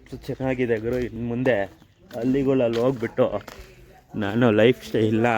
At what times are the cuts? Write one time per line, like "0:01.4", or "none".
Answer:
0:01.2